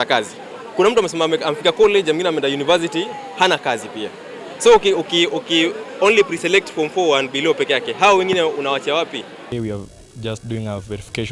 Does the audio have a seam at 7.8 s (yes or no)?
no